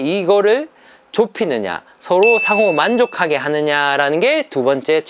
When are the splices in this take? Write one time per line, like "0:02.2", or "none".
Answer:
none

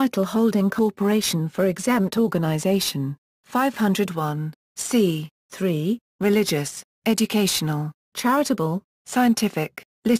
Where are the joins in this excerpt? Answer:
0:06.1

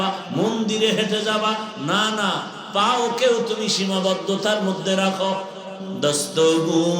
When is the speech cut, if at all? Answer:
0:05.9

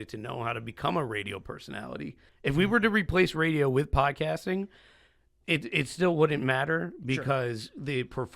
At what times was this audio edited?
0:02.2

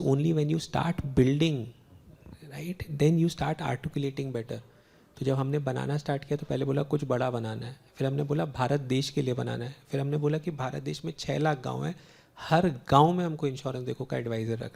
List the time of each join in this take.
none

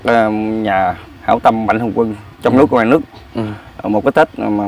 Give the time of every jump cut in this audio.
none

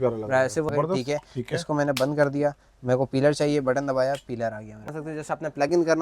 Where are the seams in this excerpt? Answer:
0:00.7
0:04.9

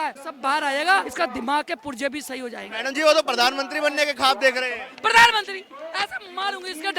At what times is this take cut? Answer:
0:01.1
0:02.7

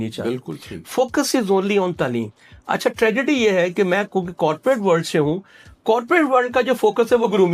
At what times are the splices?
none

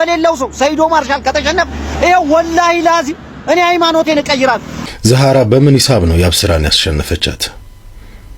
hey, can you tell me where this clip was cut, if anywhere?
0:04.8

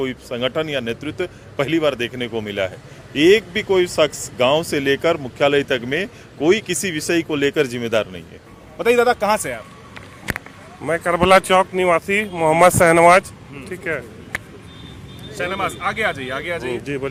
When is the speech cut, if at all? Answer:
none

